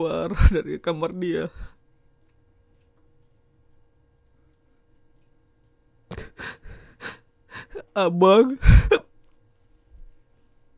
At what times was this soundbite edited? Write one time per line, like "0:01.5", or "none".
none